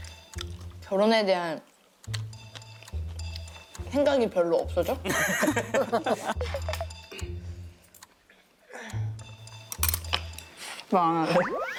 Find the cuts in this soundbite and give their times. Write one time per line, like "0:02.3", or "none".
none